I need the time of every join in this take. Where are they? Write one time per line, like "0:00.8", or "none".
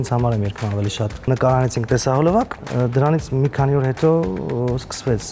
0:01.3
0:02.6